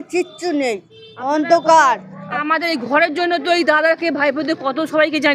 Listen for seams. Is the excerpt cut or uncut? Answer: cut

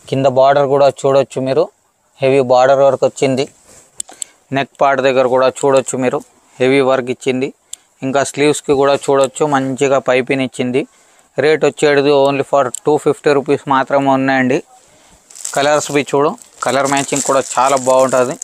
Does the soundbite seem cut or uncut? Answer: uncut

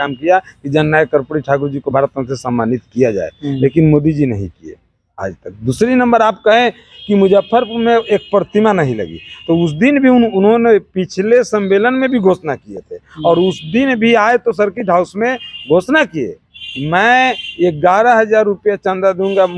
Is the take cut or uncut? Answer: uncut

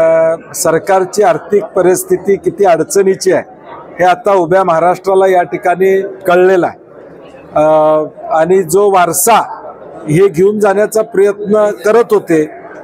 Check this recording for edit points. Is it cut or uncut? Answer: uncut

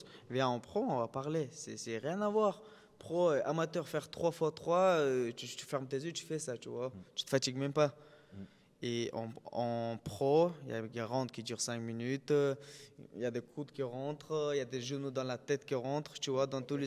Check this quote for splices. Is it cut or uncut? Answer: uncut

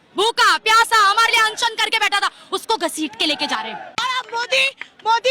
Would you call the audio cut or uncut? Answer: cut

